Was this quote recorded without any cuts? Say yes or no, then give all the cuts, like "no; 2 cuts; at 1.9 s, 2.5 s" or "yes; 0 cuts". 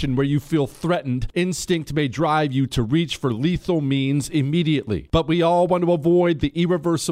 yes; 0 cuts